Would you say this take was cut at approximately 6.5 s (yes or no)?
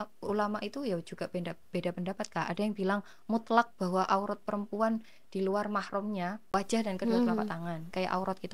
yes